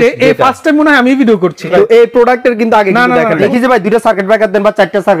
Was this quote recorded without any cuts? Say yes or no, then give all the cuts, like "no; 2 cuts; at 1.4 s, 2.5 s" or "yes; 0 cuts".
no; 2 cuts; at 1.6 s, 3.4 s